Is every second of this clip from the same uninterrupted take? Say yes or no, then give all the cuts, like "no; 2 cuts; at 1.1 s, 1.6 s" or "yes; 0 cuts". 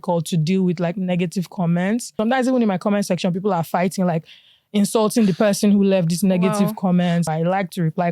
no; 2 cuts; at 2.2 s, 7.3 s